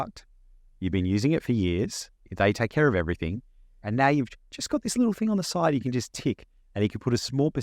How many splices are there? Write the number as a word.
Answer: one